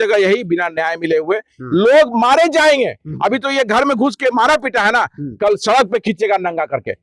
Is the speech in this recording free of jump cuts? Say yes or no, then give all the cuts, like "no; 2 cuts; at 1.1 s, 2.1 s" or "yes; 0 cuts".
yes; 0 cuts